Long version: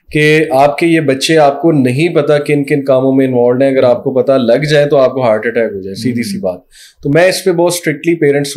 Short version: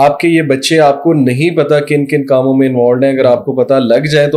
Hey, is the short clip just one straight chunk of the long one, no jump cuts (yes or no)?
yes